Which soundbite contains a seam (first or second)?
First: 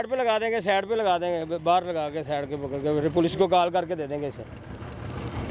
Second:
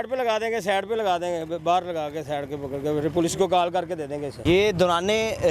second